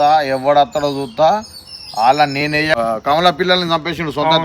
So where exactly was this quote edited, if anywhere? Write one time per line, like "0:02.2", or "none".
0:02.7